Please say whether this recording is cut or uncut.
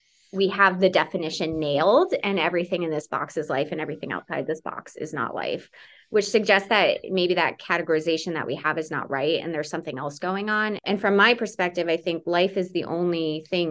cut